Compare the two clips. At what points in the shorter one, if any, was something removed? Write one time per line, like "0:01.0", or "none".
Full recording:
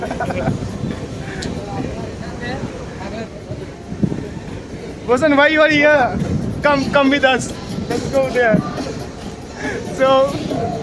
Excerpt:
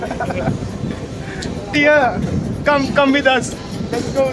0:01.7

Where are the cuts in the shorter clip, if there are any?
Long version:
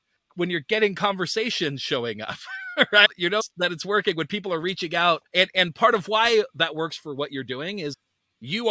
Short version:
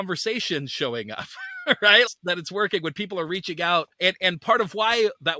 0:02.1

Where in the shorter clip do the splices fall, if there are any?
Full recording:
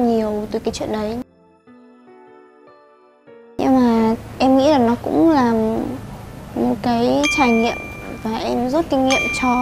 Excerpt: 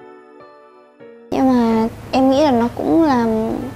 none

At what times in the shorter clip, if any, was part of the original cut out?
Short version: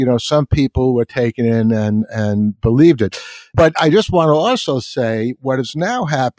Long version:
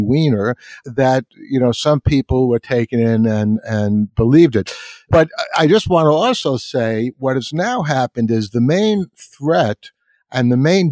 0:03.5

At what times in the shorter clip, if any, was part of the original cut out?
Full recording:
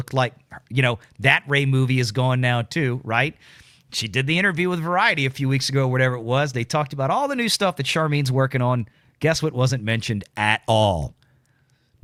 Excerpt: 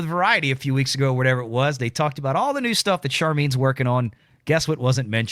none

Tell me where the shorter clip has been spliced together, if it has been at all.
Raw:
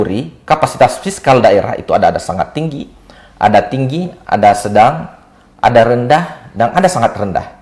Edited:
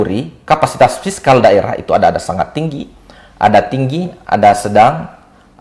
none

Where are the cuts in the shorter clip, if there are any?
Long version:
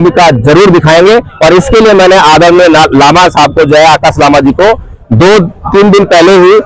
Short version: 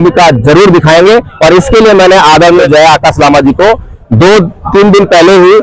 0:02.6

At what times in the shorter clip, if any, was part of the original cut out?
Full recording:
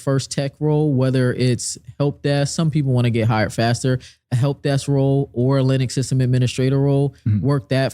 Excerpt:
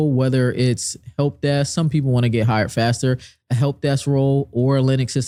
none

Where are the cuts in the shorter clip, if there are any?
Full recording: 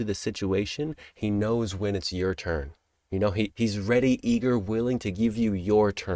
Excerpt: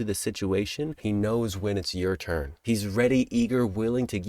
0:01.0
0:02.6

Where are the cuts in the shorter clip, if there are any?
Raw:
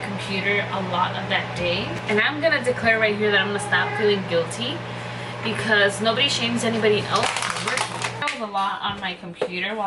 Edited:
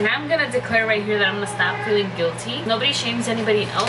0:02.6

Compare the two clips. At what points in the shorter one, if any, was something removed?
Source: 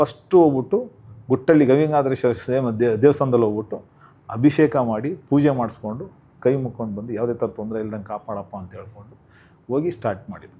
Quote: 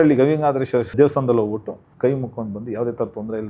0:00.9
0:01.8

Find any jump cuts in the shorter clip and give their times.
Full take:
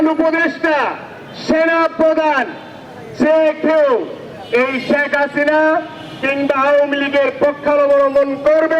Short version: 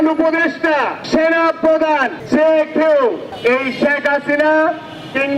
0:01.0
0:02.2
0:03.3

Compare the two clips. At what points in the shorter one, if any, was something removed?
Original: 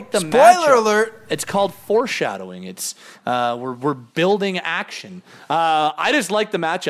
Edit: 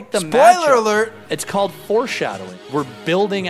0:02.6

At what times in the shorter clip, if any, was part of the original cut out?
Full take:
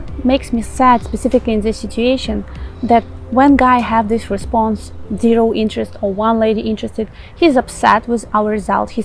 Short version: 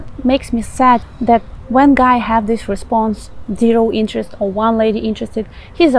0:01.1

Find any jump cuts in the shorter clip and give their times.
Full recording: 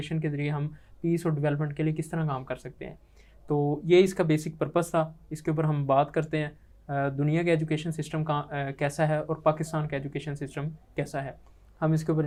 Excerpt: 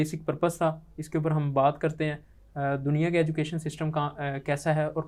none

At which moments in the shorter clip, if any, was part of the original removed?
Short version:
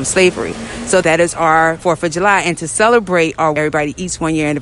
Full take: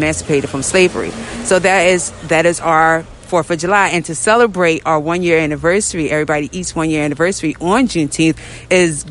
0:01.0
0:01.8
0:03.6

